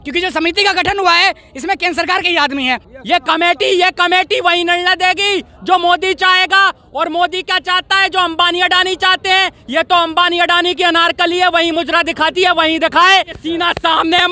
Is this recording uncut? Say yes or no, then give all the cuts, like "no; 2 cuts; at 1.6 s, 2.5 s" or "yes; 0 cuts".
no; 2 cuts; at 2.9 s, 13.4 s